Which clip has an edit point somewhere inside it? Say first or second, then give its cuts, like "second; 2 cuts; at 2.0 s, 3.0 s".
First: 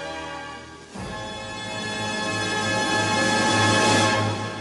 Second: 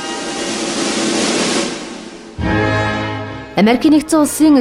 second; 1 cut; at 3.3 s